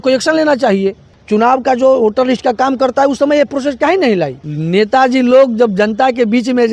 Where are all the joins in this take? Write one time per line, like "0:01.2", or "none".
0:01.1
0:04.5